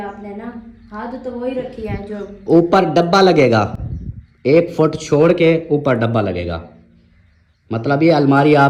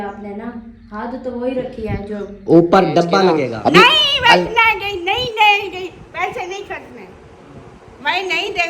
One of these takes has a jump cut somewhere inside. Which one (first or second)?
second